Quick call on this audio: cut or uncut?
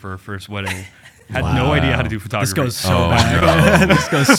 uncut